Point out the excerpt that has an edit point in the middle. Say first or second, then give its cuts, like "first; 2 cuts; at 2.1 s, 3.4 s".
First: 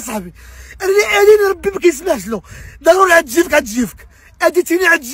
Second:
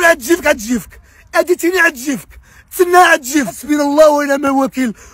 second; 1 cut; at 3.6 s